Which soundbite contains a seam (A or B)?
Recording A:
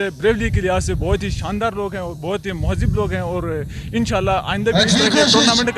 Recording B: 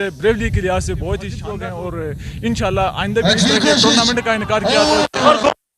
B